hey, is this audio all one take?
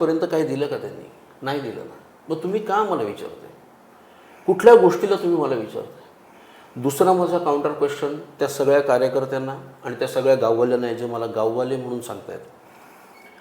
yes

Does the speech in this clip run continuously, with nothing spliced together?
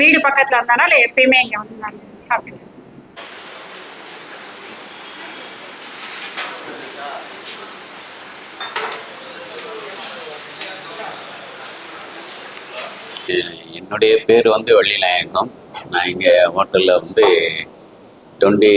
yes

